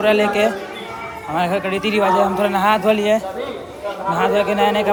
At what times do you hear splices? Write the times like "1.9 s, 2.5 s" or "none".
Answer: none

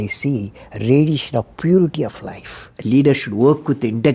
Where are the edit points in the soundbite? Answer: 2.7 s

